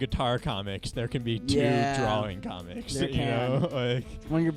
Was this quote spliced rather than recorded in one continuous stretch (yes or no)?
no